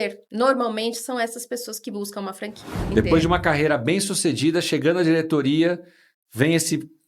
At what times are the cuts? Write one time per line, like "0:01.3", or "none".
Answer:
0:02.9